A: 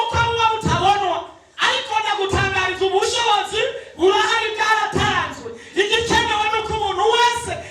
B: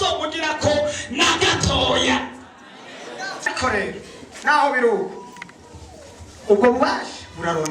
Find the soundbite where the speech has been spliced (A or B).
B